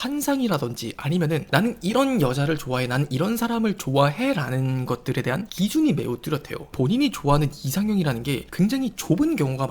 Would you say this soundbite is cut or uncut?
cut